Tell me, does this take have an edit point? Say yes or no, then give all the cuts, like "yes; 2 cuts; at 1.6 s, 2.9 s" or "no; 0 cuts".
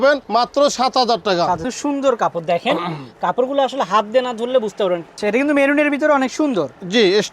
yes; 2 cuts; at 1.7 s, 5.2 s